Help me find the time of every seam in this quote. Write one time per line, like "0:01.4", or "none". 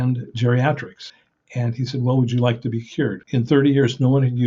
0:01.2
0:03.2